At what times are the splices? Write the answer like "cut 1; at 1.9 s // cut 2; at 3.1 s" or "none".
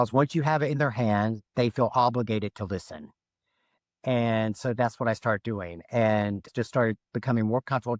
none